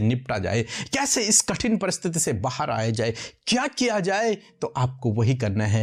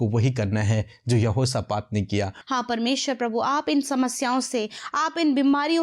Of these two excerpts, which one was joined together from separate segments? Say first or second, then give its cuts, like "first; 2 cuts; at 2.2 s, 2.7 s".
second; 1 cut; at 2.4 s